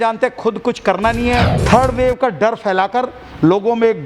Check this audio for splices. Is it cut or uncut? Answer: cut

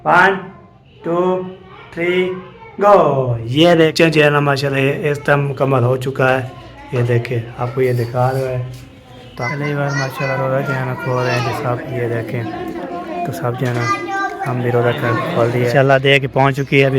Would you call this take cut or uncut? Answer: cut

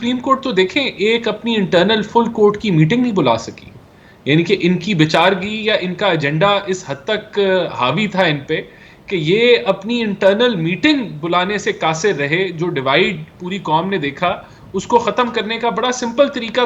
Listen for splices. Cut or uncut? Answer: uncut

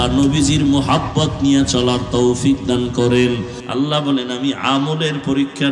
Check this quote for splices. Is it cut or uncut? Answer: cut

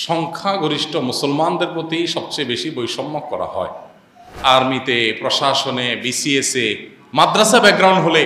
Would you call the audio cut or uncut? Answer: cut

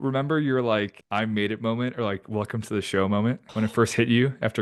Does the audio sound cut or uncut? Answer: cut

